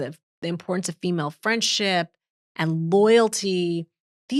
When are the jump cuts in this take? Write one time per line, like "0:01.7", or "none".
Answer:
none